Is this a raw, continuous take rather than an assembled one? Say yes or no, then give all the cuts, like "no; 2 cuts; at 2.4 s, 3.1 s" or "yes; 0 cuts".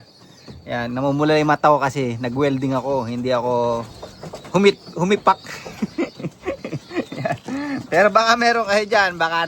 yes; 0 cuts